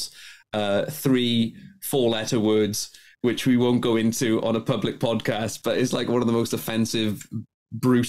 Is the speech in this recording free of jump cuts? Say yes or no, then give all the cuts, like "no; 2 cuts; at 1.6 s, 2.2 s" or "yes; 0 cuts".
yes; 0 cuts